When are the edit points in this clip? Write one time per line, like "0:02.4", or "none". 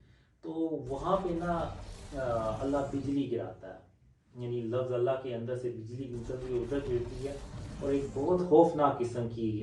none